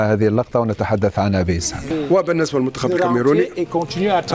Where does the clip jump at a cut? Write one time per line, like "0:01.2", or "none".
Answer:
0:01.9